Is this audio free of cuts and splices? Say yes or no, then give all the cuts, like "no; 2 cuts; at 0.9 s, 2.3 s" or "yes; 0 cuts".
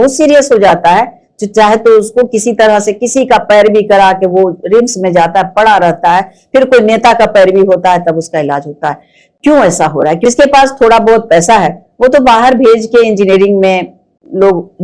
no; 1 cut; at 10.2 s